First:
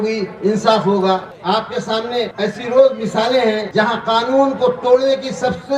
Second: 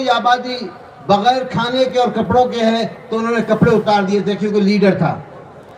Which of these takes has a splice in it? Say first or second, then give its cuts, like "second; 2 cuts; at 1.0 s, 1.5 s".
first; 3 cuts; at 1.3 s, 2.3 s, 3.6 s